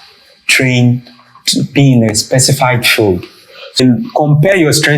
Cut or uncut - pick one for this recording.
cut